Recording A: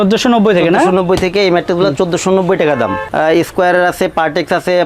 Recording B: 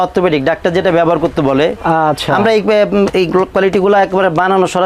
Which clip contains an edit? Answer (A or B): A